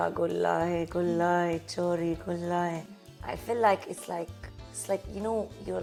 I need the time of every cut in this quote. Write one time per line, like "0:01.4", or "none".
none